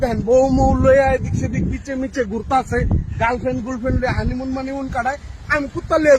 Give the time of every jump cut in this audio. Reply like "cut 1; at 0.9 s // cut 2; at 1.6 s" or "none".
cut 1; at 5.3 s